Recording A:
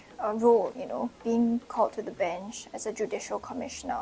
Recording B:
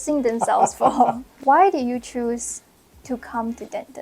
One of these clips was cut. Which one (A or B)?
B